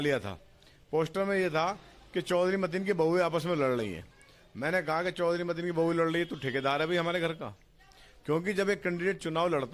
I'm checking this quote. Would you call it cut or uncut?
uncut